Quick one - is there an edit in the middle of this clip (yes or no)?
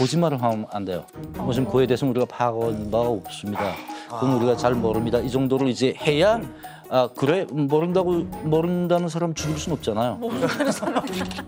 no